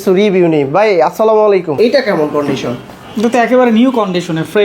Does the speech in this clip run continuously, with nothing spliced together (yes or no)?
no